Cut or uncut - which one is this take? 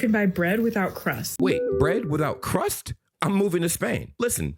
cut